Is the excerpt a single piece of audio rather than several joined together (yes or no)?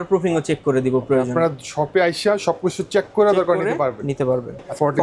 yes